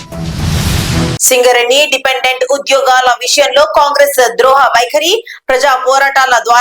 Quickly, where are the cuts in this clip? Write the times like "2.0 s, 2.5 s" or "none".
1.2 s